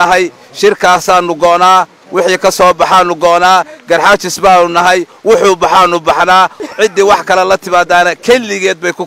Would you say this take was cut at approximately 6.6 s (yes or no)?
yes